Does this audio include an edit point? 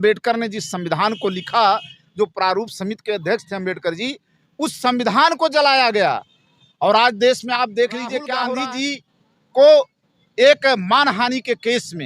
yes; 1 cut; at 8.6 s

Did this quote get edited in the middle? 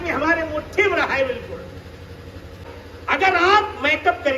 yes; 1 cut; at 2.6 s

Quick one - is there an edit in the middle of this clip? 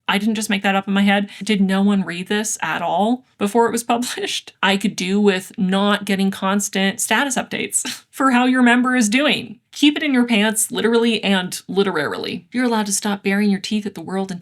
yes; 4 cuts; at 1.4 s, 4.5 s, 9.6 s, 12.4 s

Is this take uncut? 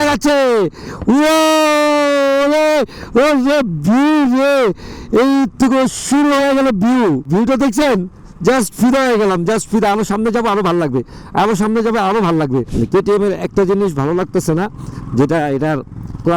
yes; 0 cuts

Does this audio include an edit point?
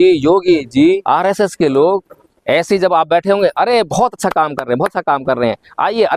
yes; 1 cut; at 1.0 s

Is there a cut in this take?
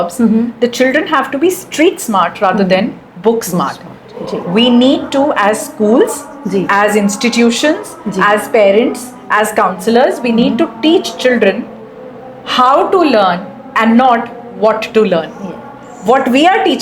no; 0 cuts

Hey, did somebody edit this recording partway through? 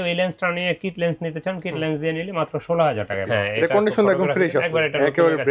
yes; 1 cut; at 3.2 s

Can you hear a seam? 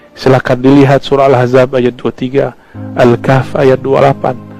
no; 0 cuts

